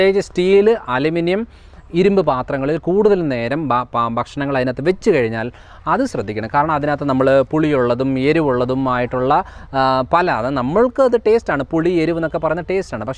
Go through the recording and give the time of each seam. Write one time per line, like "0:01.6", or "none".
none